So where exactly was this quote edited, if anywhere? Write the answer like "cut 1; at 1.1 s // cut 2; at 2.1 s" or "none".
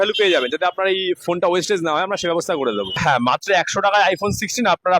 cut 1; at 3.0 s